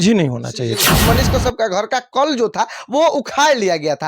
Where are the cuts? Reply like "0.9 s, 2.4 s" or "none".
1.0 s